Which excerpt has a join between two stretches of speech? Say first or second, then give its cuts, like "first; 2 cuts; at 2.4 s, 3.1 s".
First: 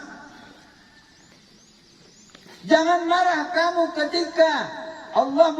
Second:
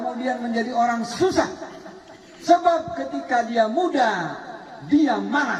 first; 1 cut; at 1.3 s